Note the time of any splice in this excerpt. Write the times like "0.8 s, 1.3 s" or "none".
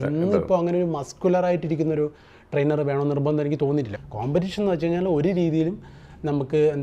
4.0 s